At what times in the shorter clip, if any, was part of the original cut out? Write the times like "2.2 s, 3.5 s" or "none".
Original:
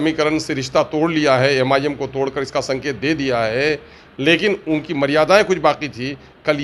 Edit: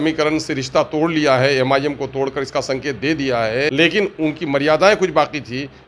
3.7 s